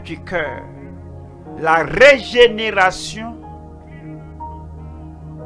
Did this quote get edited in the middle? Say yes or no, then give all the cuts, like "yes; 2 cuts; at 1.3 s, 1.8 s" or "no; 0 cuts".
no; 0 cuts